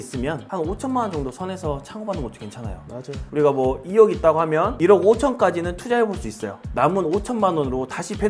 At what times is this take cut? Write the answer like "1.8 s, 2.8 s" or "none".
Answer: 6.7 s